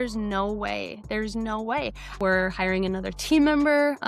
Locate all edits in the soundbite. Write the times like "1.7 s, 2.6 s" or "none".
2.2 s